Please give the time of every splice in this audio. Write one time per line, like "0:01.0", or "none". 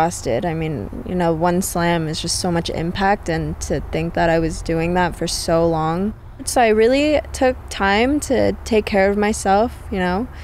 0:06.5